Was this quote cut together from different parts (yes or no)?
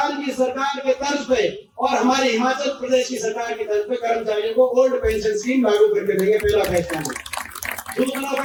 no